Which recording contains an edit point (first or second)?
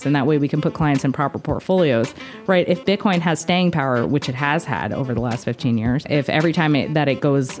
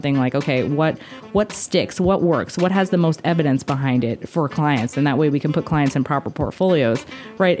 first